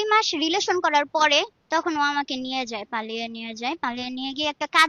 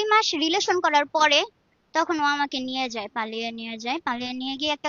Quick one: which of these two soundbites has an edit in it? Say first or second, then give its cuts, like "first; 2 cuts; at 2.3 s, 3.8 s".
first; 1 cut; at 1.6 s